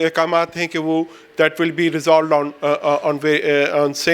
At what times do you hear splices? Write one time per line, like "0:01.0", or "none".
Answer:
none